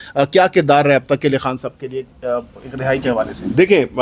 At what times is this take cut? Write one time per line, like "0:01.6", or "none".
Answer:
none